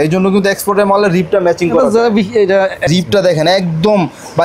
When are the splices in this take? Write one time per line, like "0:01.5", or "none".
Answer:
0:02.9

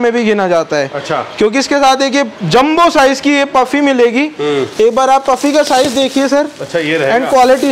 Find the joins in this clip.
none

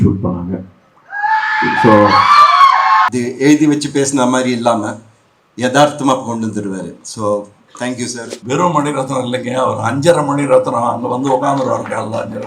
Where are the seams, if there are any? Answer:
0:03.1
0:08.3

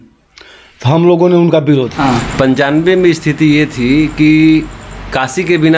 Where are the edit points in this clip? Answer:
0:01.9

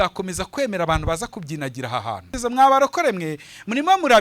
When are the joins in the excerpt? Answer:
0:02.3

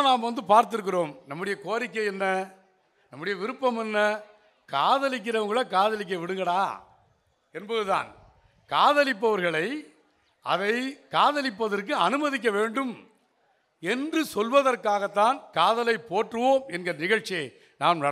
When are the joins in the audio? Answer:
none

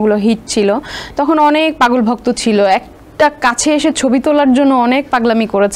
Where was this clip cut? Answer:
none

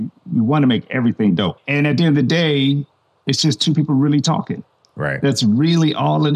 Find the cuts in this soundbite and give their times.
0:01.5

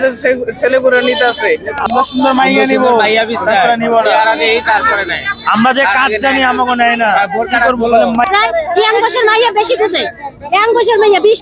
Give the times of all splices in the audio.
0:01.8
0:08.2

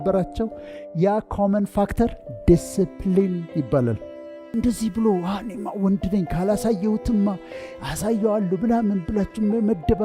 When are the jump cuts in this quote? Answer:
0:04.5

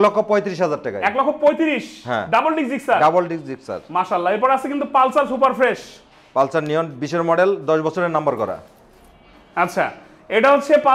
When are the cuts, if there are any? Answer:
none

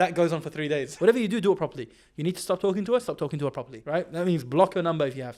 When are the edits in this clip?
0:00.9
0:03.7

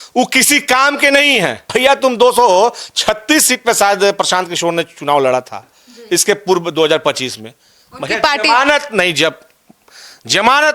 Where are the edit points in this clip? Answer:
0:01.6

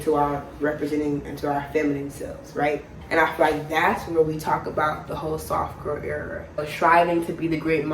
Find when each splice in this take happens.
0:06.7

